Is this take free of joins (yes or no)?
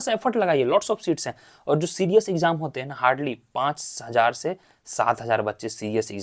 yes